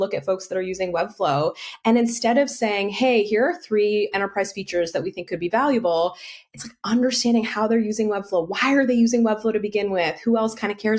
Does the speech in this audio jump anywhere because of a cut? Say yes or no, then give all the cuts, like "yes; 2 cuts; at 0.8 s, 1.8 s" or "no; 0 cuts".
no; 0 cuts